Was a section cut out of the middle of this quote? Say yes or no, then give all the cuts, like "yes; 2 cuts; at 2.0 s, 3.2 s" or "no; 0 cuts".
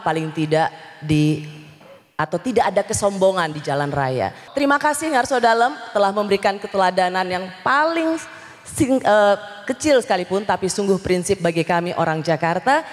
yes; 1 cut; at 4.4 s